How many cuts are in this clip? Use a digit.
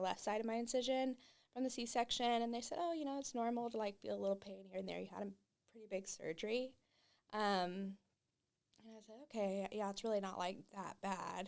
0